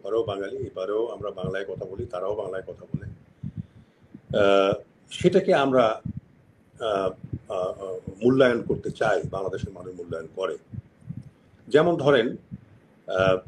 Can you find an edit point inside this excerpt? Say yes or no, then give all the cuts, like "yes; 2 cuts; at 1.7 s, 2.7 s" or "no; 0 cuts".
no; 0 cuts